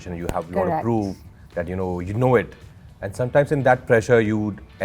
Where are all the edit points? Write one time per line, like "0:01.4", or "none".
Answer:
none